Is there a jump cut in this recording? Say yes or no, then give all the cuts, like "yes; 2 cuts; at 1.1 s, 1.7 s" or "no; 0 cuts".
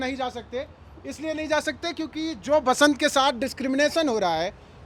no; 0 cuts